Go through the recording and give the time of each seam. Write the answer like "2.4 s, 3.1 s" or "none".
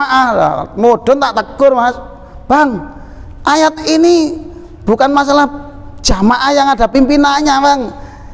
none